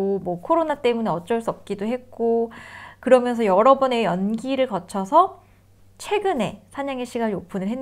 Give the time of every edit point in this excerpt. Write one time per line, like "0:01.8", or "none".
none